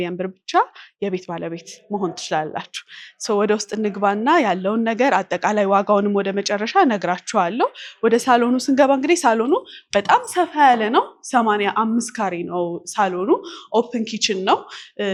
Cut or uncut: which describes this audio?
uncut